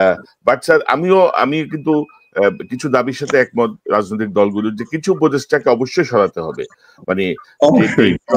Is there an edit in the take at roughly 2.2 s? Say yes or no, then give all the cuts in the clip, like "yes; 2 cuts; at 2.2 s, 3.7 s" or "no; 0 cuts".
no; 0 cuts